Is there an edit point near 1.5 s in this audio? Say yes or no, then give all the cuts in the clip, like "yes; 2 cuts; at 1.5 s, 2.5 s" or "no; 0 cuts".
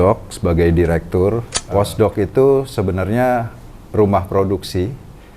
yes; 1 cut; at 1.5 s